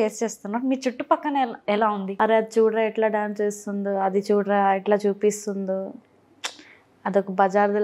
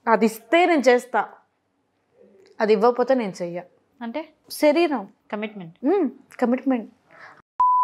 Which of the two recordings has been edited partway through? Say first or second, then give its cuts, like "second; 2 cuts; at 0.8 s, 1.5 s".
first; 1 cut; at 2.1 s